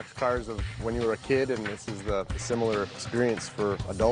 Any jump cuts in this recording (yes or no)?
yes